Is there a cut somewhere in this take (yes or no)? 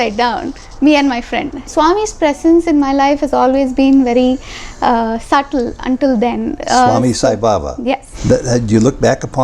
yes